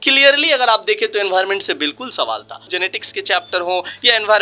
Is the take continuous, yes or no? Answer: no